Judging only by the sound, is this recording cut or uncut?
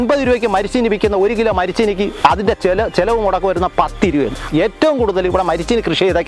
cut